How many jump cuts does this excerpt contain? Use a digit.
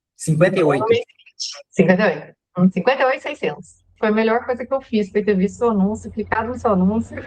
1